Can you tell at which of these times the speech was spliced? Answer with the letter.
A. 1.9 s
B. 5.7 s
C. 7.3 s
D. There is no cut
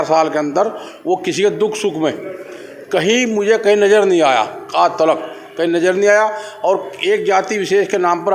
D